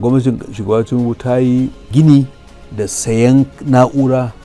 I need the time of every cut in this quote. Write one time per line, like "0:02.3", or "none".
none